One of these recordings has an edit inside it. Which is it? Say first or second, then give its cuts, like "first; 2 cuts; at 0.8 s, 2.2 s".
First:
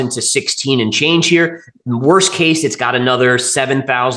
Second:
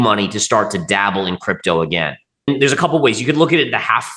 second; 1 cut; at 2.4 s